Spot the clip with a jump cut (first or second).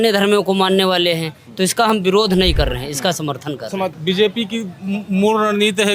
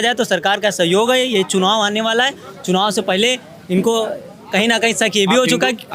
first